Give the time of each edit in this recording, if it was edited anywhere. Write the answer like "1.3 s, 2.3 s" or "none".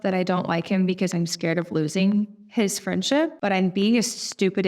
3.4 s